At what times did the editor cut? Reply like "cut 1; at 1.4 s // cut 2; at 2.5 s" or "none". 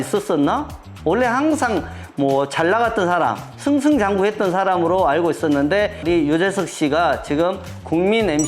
cut 1; at 6.0 s